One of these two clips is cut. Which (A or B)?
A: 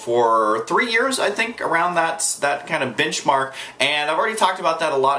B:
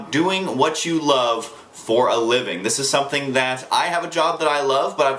A